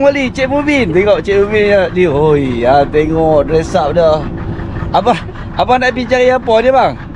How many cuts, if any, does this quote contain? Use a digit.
0